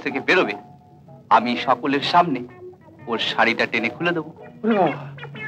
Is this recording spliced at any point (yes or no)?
no